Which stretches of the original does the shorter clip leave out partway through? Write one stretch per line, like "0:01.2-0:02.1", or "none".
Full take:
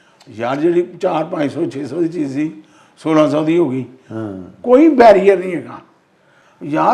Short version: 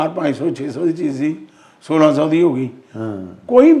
none